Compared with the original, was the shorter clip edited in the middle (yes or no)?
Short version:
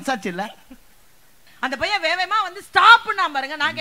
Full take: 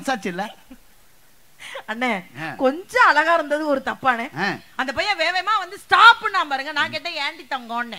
yes